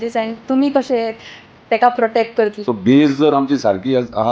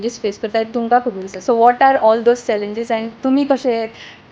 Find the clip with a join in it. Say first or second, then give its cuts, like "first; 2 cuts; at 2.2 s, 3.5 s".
first; 1 cut; at 2.6 s